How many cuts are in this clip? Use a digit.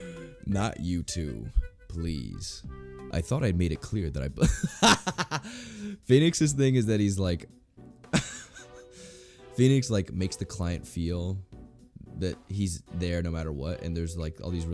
1